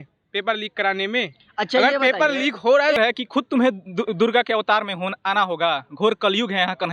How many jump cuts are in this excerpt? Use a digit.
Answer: 1